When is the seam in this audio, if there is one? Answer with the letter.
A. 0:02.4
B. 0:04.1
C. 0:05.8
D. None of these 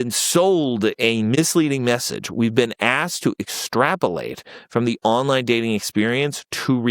D